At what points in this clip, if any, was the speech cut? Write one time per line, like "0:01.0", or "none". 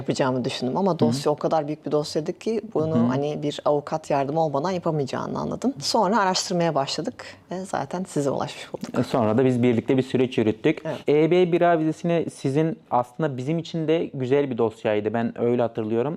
none